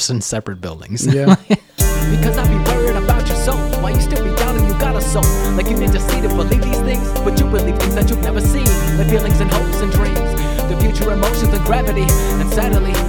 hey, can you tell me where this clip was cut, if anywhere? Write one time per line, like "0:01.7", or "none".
0:01.8